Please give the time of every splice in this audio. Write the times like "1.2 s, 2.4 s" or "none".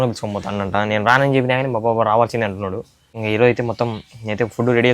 3.1 s